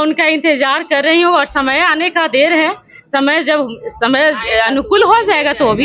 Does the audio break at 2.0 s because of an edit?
no; 0 cuts

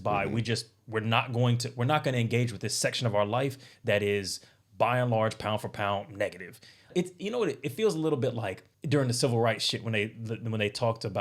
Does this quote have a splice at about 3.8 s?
no; 2 cuts; at 6.9 s, 8.7 s

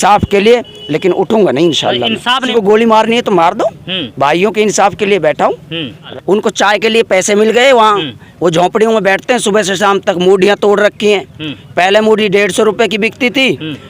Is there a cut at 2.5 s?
yes; 2 cuts; at 2.5 s, 6.0 s

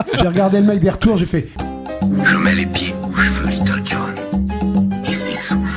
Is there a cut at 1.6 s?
yes; 1 cut; at 1.6 s

